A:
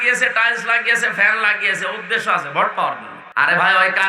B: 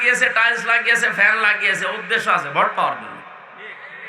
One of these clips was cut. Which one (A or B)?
A